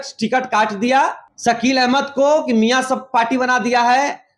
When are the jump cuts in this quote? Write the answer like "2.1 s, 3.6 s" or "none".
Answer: 1.3 s